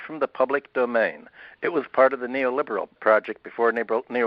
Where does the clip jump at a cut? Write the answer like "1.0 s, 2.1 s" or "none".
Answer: 3.0 s